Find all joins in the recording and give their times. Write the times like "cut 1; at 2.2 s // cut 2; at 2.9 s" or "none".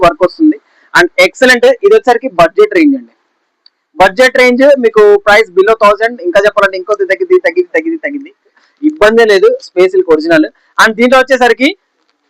cut 1; at 8.5 s